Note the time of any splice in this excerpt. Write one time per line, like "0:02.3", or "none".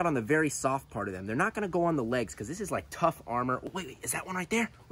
0:03.7